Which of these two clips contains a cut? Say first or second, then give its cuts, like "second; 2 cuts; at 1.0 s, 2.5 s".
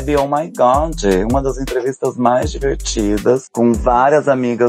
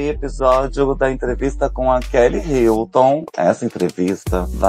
second; 1 cut; at 3.3 s